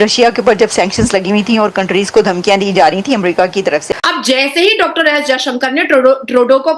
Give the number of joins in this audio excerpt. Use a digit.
1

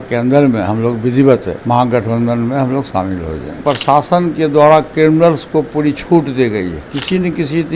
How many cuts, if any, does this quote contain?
3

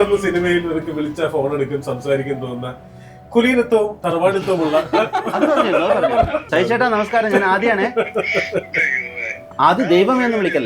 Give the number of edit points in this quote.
1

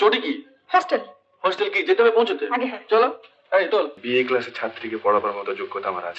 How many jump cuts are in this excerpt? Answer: 1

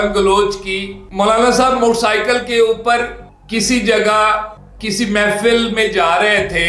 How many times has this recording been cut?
1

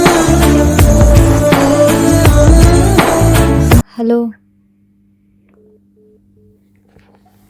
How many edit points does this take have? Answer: 1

